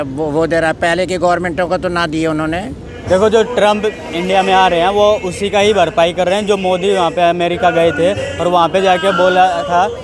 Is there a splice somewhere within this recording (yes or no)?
yes